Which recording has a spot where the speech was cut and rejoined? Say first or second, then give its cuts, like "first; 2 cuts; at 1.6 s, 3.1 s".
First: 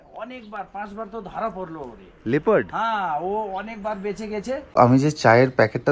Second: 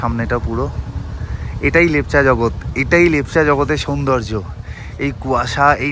first; 1 cut; at 4.7 s